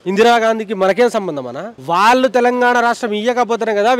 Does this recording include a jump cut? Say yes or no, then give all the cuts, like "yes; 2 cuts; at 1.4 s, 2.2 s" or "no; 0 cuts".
no; 0 cuts